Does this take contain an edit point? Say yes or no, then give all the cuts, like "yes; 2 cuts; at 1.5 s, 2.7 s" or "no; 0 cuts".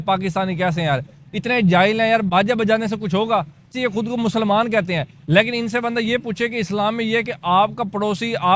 yes; 1 cut; at 3.7 s